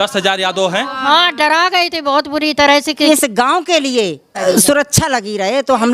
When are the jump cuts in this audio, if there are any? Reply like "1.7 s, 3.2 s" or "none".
3.1 s, 4.3 s